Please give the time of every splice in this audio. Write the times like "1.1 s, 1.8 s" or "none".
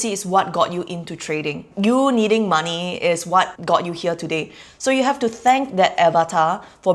1.7 s, 3.6 s